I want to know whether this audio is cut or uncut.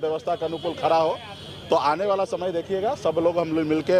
uncut